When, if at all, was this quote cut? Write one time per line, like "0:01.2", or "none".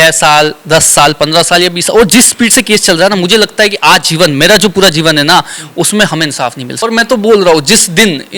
0:06.7